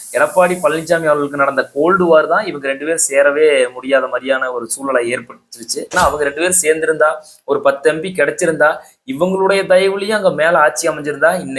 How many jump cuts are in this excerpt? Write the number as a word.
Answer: one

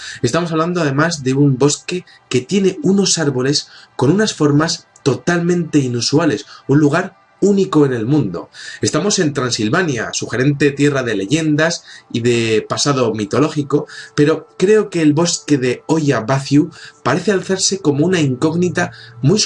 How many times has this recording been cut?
one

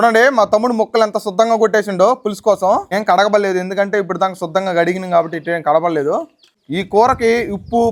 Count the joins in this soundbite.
zero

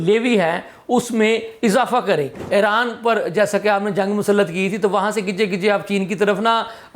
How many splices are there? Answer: one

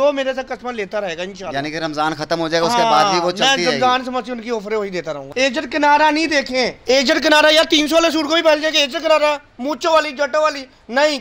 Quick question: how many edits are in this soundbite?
two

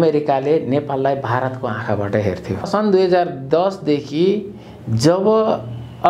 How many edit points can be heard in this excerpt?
one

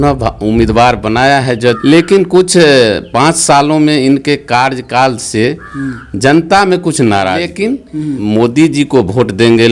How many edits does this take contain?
two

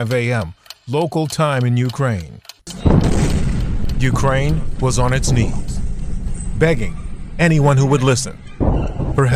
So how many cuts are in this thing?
one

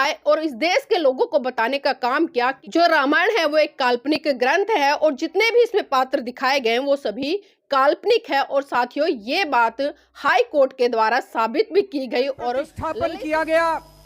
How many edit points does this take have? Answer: two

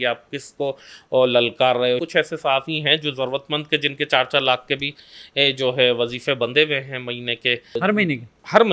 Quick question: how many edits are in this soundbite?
two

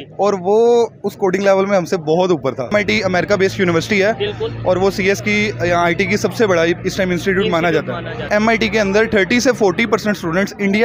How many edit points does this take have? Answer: two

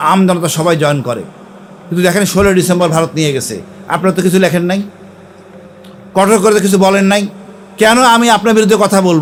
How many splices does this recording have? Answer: zero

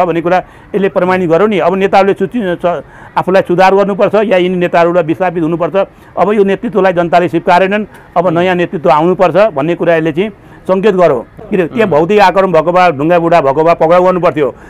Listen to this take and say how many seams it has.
one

